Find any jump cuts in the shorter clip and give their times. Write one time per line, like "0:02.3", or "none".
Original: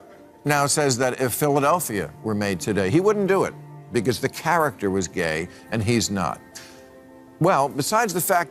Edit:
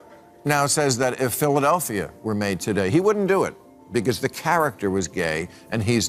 none